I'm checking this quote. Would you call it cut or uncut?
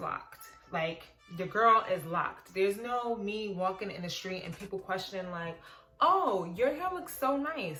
uncut